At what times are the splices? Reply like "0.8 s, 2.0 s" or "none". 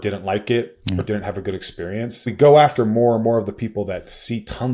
2.3 s